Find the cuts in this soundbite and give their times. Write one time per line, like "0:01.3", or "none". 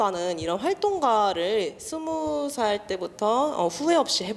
none